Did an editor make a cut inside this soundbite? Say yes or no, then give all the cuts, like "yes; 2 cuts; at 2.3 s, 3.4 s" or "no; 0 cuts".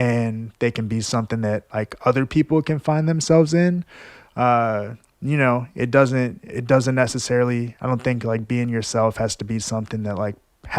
no; 0 cuts